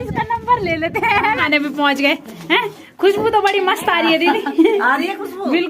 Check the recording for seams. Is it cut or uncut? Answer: cut